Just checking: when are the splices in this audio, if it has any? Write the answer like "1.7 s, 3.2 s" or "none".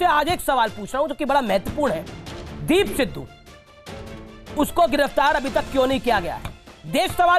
none